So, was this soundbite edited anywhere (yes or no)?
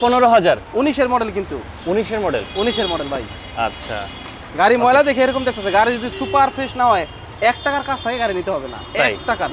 no